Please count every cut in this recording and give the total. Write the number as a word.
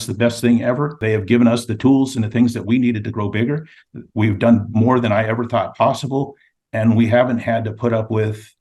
one